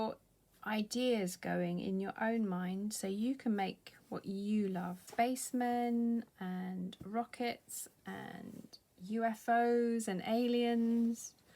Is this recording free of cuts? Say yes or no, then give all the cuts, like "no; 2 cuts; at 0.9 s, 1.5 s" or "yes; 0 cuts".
no; 1 cut; at 5.0 s